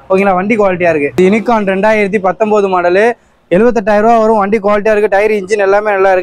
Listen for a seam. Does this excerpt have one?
no; 0 cuts

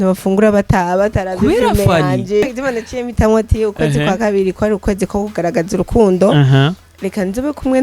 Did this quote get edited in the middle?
yes; 1 cut; at 2.4 s

